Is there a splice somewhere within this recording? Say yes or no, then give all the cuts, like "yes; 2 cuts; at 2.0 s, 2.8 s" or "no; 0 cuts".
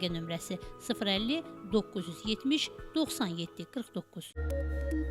yes; 1 cut; at 4.2 s